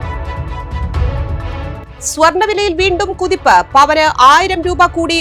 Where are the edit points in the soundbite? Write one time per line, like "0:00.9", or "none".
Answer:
none